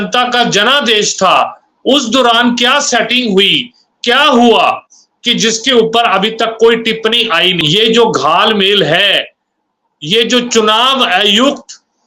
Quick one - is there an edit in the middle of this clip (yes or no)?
yes